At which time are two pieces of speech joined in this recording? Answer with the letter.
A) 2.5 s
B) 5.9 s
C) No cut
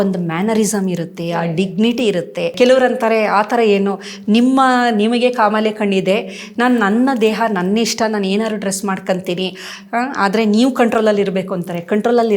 A